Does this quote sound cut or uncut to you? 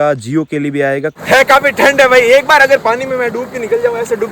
cut